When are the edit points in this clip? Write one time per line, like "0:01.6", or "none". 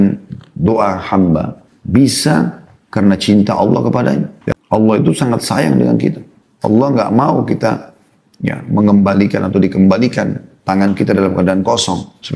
0:04.4

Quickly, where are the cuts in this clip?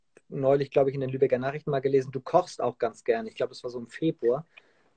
0:03.1

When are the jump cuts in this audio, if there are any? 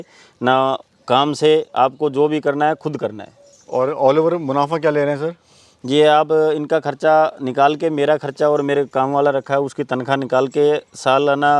0:03.4

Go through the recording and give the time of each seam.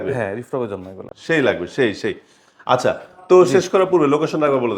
none

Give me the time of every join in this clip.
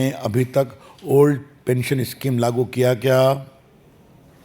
none

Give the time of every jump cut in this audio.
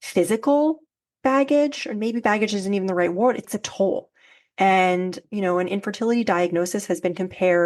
0:03.4
0:05.2

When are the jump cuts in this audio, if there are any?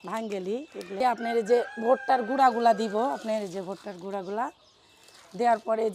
0:01.0

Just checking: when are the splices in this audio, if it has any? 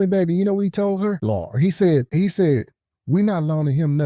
0:01.2
0:02.1

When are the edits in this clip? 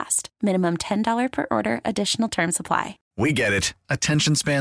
0:03.0

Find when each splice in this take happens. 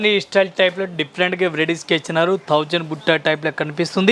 none

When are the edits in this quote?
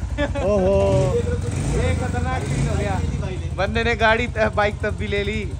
none

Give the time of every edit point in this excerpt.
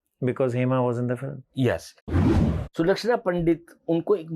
0:02.2

